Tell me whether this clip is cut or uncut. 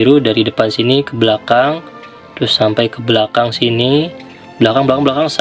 uncut